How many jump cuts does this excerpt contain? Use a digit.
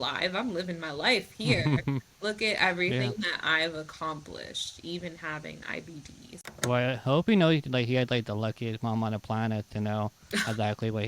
1